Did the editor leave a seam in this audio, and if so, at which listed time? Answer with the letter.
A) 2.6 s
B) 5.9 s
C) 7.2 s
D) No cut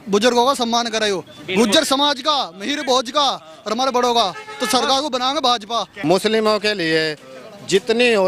B